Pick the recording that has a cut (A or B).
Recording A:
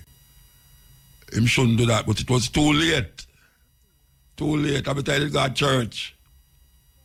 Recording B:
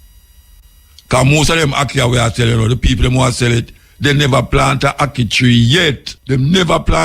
B